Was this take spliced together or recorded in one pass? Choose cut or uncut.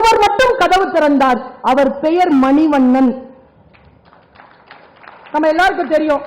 uncut